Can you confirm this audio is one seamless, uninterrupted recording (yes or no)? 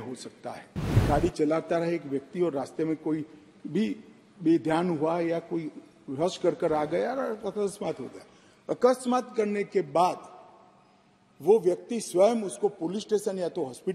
no